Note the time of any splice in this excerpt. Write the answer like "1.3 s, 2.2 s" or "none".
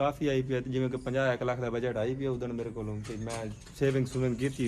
none